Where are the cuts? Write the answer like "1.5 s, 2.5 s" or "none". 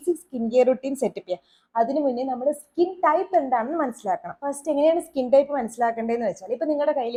none